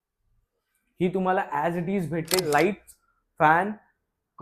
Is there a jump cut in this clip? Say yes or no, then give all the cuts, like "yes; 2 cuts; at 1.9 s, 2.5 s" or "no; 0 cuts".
yes; 1 cut; at 2.4 s